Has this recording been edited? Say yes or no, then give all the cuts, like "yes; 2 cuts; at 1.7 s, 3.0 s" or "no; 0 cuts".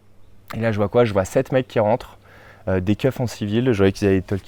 no; 0 cuts